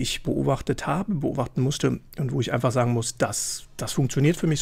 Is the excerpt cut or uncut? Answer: cut